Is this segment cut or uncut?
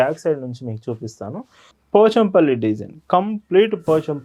cut